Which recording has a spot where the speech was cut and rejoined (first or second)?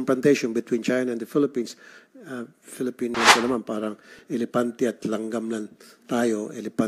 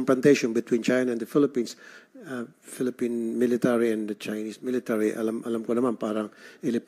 first